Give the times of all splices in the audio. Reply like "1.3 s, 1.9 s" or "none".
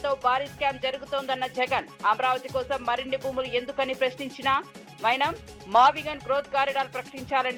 none